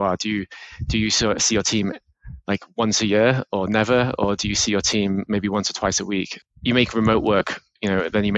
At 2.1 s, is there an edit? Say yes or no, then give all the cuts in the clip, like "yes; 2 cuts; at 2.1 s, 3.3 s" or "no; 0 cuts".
no; 1 cut; at 6.4 s